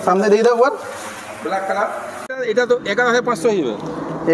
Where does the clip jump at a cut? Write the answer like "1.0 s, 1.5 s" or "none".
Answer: 2.3 s